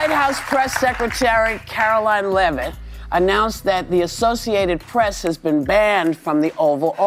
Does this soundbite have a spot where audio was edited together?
no; 0 cuts

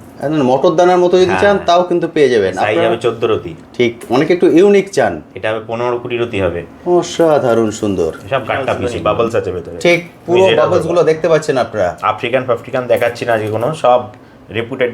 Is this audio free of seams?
no; 1 cut; at 8.9 s

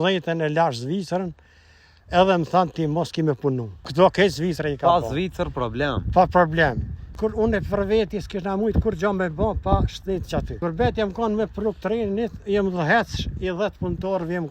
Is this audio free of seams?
no; 3 cuts; at 3.8 s, 7.1 s, 10.5 s

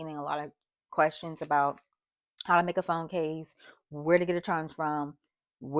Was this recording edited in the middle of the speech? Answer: no; 0 cuts

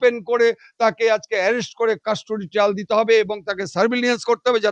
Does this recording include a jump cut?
no; 0 cuts

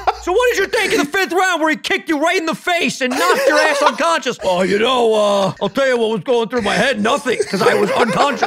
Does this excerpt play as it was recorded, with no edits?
no; 2 cuts; at 4.4 s, 5.6 s

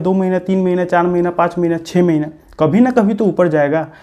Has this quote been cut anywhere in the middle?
no; 0 cuts

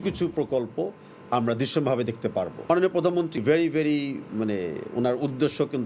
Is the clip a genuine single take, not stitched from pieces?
no; 2 cuts; at 2.6 s, 3.4 s

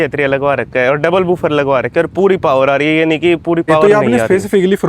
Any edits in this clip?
yes; 1 cut; at 3.8 s

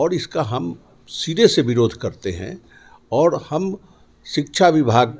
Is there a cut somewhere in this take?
no; 0 cuts

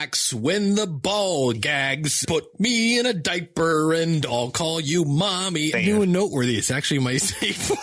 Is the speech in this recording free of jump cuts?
no; 2 cuts; at 2.2 s, 5.7 s

